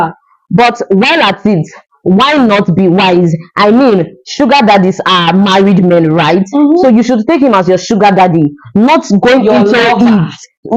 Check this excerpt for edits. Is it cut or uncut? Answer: uncut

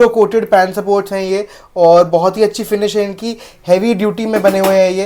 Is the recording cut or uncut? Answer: uncut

